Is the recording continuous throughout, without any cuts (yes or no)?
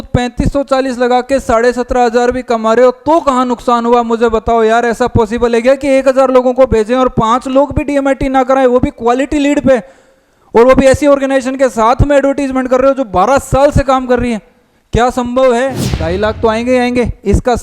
no